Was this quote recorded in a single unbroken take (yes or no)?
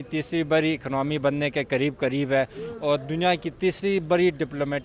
yes